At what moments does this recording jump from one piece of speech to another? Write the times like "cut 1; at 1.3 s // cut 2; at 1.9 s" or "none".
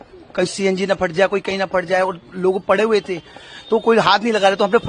none